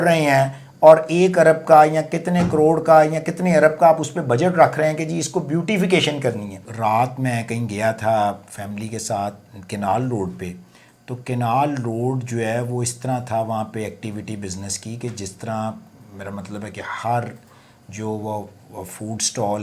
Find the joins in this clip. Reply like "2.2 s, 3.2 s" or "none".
6.6 s